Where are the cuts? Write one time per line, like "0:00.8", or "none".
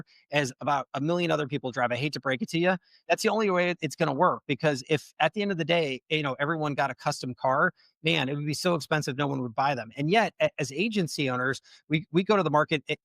0:02.9